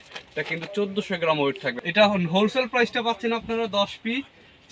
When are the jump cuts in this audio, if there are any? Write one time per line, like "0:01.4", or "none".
0:01.7